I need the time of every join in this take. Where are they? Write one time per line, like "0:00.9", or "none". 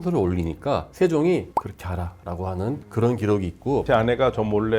0:03.8